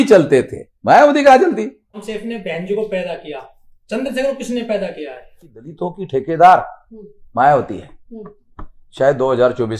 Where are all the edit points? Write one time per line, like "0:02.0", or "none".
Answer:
0:02.0
0:05.7

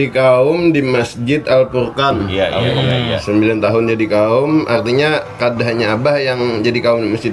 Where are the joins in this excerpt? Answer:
0:02.3

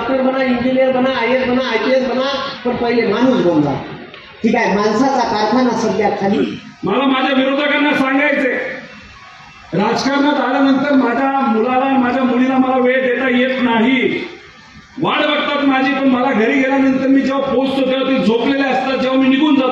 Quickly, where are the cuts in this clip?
0:06.4

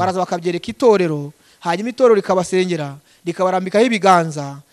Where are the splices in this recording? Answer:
none

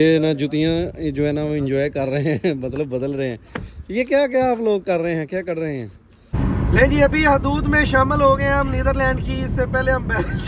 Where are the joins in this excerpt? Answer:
0:06.3

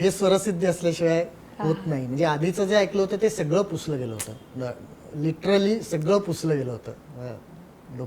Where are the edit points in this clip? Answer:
none

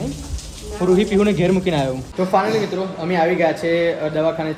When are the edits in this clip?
0:02.0

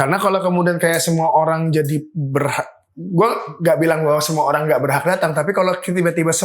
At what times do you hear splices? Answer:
none

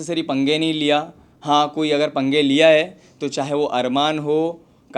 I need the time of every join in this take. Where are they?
none

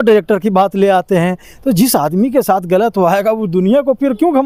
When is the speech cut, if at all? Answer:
none

